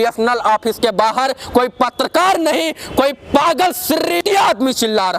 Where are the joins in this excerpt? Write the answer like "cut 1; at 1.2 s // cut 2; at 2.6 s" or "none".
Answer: cut 1; at 4.2 s